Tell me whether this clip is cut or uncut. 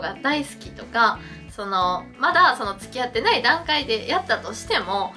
uncut